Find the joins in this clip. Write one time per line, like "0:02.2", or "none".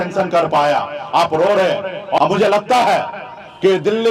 0:02.2